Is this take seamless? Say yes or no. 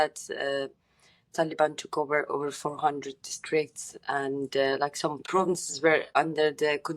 no